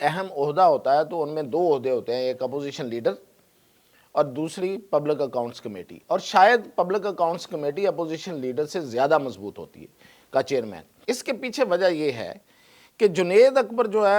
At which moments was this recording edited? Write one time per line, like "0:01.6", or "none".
0:10.9